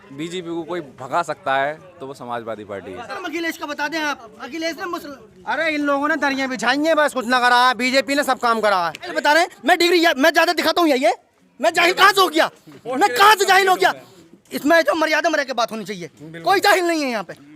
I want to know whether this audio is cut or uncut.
cut